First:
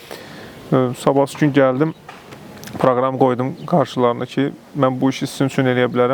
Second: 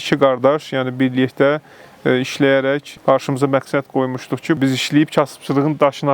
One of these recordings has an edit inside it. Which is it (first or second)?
second